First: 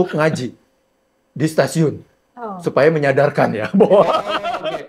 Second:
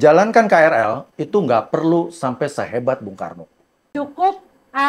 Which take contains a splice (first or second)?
second